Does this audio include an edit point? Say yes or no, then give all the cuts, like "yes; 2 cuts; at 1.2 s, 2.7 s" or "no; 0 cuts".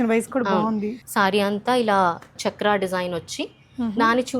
yes; 2 cuts; at 1.0 s, 2.4 s